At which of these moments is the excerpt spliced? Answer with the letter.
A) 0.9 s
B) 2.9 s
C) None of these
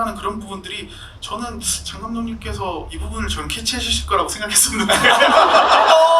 B